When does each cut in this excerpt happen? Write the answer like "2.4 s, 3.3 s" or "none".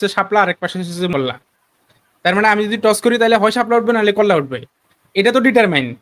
1.1 s